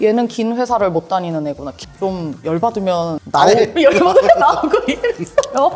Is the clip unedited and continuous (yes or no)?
no